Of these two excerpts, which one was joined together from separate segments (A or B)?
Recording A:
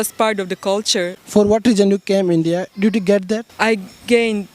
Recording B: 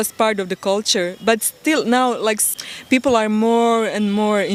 A